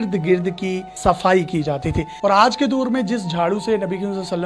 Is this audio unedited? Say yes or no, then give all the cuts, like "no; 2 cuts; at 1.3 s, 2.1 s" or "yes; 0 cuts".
no; 1 cut; at 2.1 s